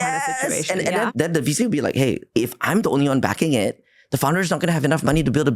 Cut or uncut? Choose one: cut